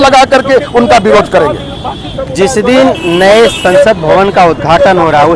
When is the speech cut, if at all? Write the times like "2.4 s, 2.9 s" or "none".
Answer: none